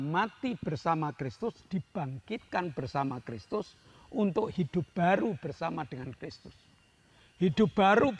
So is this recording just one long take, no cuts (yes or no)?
yes